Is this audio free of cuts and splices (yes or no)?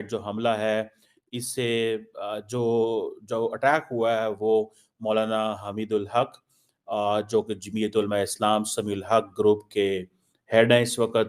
yes